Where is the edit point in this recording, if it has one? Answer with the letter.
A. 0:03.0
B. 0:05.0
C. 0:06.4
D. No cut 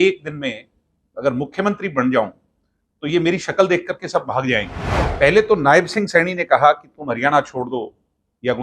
B